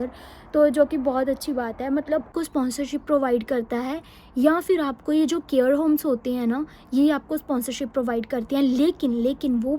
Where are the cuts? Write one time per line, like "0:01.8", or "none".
0:02.3